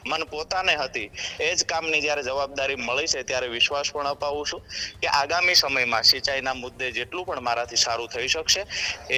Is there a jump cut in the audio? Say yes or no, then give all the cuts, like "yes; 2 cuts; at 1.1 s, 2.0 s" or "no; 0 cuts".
no; 0 cuts